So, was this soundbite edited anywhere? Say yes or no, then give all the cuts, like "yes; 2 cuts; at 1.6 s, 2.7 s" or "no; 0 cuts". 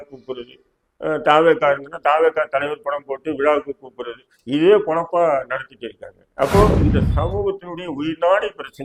no; 0 cuts